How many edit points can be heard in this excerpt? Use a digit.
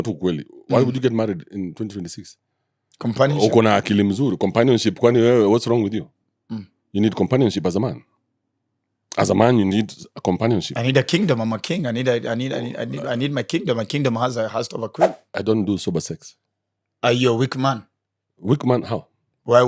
1